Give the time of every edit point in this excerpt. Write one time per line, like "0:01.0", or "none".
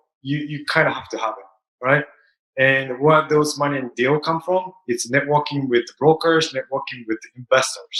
none